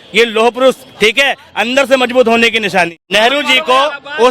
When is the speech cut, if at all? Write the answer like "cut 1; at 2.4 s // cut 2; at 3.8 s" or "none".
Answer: cut 1; at 3.1 s

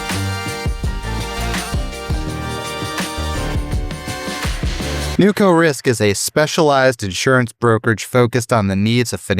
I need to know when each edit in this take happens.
cut 1; at 5.1 s

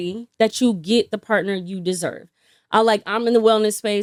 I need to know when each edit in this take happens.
none

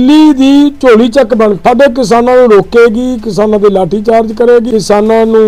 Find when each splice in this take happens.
cut 1; at 0.8 s // cut 2; at 1.6 s // cut 3; at 4.7 s

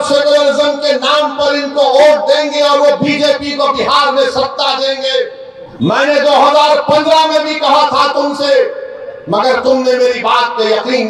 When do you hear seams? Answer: none

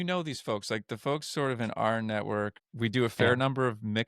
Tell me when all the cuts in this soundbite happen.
cut 1; at 2.6 s

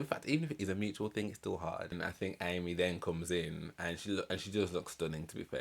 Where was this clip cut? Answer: cut 1; at 1.9 s

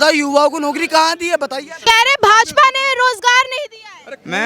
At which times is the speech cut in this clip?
cut 1; at 1.8 s

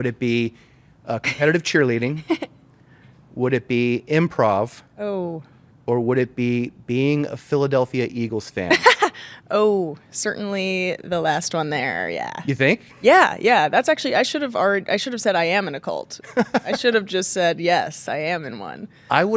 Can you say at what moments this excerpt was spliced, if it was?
none

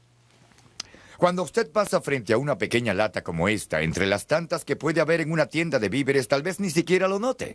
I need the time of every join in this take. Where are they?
none

